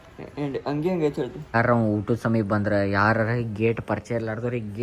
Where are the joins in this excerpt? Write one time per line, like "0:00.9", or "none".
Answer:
0:01.5